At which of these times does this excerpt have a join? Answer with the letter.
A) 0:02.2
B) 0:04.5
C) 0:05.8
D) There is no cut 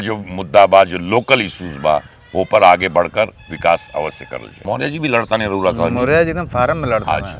B